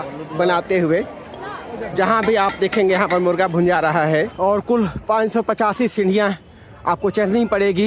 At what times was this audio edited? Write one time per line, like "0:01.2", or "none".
0:04.3